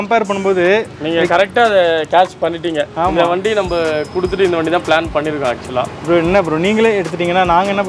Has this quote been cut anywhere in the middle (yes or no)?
no